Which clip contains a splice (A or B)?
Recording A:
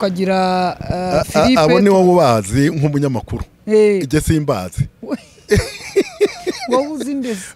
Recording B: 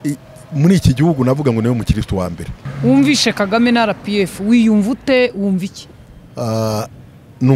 B